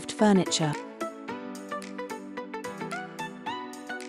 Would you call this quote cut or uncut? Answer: cut